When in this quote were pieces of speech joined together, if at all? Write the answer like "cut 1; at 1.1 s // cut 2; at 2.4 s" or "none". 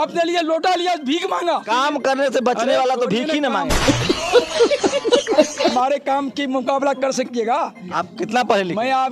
cut 1; at 1.7 s // cut 2; at 3.8 s // cut 3; at 5.7 s // cut 4; at 7.8 s